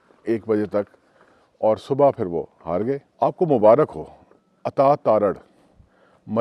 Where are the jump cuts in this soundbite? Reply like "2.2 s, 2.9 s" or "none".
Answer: 3.1 s